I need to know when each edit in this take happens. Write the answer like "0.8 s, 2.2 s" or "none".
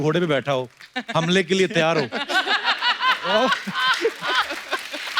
none